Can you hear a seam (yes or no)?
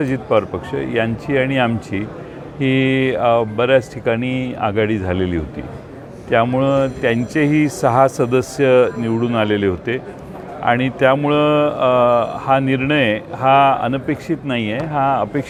no